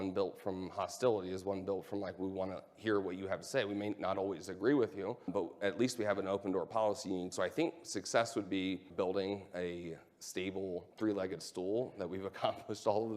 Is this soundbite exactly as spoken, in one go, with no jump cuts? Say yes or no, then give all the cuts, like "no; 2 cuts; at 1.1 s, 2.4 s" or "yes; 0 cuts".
no; 4 cuts; at 5.3 s, 7.3 s, 8.9 s, 10.9 s